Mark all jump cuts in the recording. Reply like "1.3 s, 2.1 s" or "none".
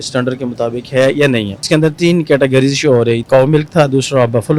1.7 s, 3.2 s